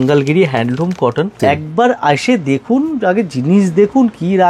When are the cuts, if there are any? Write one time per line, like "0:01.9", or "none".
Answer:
0:01.4